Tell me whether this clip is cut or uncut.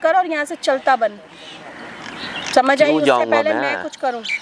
uncut